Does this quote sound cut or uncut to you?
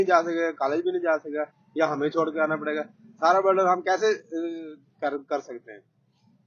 uncut